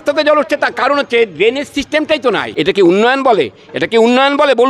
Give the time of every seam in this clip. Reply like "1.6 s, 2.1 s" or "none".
2.5 s

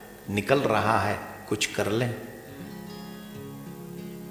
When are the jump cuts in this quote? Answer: none

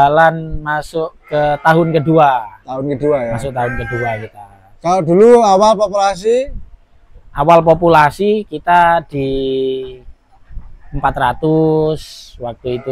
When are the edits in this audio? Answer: none

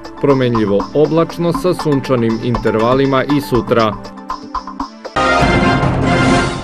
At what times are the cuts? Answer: 5.0 s

